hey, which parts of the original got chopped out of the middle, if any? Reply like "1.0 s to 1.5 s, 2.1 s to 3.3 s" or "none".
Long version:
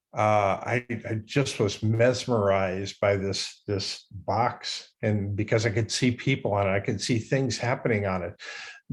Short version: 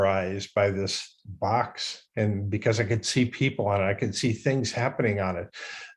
3.5 s to 3.9 s